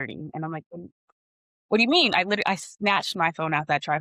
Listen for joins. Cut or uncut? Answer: uncut